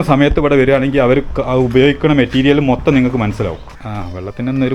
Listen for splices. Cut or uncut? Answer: cut